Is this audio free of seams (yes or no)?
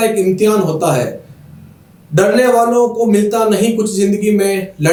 yes